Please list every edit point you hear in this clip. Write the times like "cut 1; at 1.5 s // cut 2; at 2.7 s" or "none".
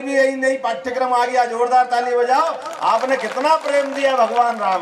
none